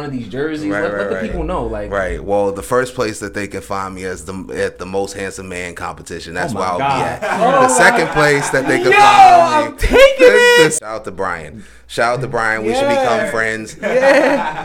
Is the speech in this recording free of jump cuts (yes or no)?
no